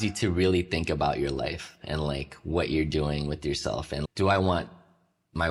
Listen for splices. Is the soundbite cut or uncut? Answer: uncut